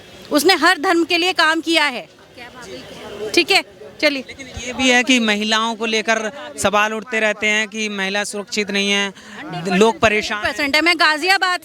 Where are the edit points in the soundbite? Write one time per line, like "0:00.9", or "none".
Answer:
none